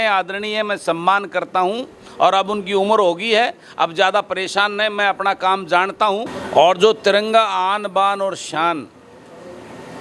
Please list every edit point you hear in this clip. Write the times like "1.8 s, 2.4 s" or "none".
6.4 s

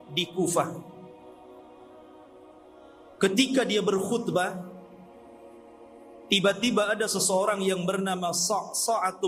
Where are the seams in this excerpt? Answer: none

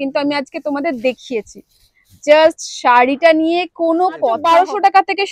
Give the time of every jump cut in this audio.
4.4 s

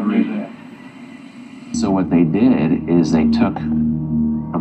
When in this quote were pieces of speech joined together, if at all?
1.7 s

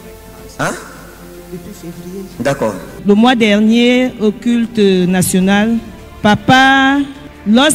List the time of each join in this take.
3.0 s

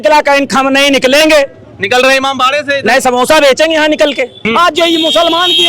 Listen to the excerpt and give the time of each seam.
4.4 s

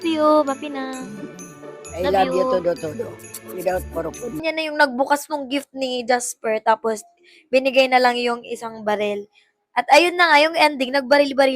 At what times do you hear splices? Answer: 4.4 s

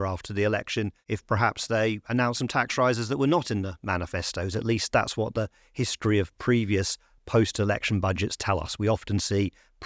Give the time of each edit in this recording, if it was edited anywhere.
1.0 s

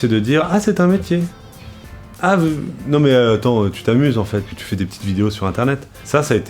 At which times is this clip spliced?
none

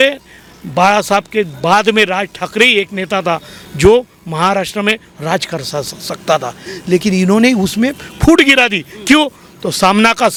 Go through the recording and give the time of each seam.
none

